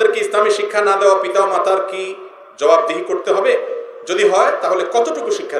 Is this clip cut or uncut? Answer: uncut